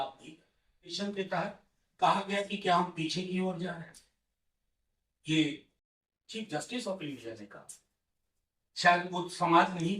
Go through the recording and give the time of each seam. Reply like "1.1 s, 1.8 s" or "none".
0.9 s

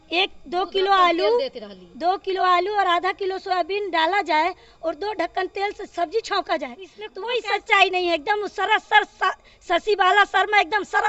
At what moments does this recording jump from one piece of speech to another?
7.0 s

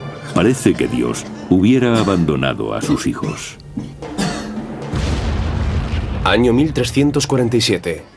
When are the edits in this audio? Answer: 3.0 s

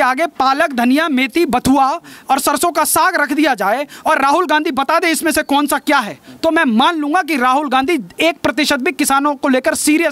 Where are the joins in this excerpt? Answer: none

